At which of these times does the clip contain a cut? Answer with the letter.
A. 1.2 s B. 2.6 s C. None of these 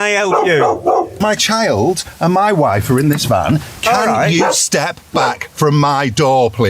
A